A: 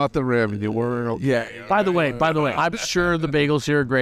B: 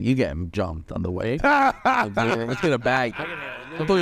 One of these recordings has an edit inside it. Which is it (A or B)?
A